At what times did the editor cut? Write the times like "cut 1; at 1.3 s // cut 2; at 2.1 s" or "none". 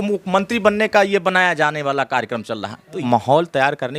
cut 1; at 3.0 s